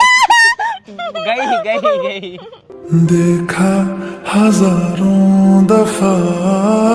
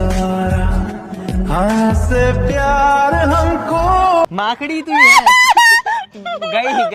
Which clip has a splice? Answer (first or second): second